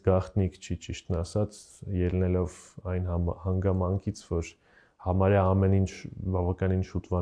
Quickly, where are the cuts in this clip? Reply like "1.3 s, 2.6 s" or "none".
none